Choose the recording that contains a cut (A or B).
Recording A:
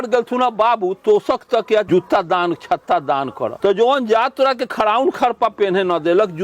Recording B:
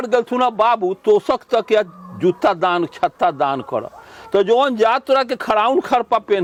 A